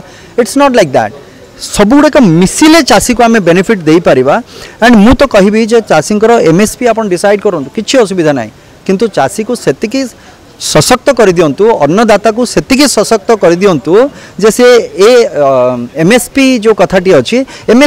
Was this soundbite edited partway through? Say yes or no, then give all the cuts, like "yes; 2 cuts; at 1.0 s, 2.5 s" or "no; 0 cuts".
no; 0 cuts